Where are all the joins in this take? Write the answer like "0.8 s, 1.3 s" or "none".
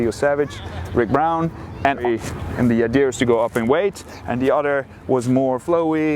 2.0 s